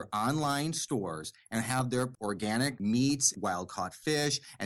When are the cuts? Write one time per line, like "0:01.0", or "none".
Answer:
0:02.2
0:03.3